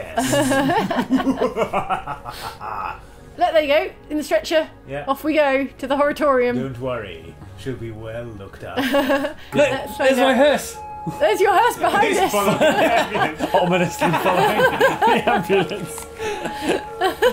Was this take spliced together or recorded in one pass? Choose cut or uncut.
cut